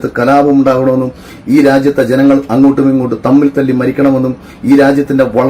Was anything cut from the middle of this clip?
no; 0 cuts

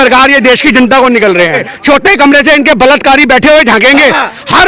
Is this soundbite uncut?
no; 1 cut; at 1.7 s

